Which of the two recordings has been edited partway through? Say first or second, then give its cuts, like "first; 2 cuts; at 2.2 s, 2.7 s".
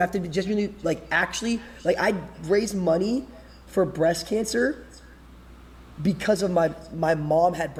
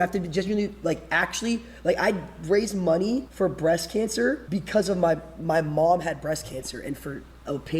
second; 2 cuts; at 3.3 s, 4.4 s